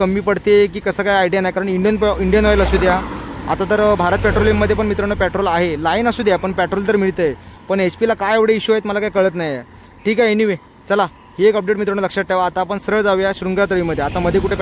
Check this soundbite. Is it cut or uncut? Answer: uncut